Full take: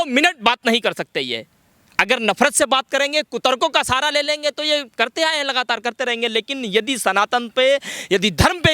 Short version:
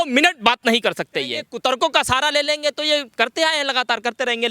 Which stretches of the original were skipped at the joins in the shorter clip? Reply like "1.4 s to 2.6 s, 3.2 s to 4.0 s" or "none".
1.5 s to 3.2 s